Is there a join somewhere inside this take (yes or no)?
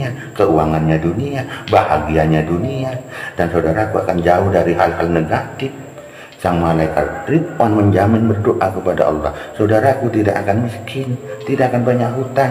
no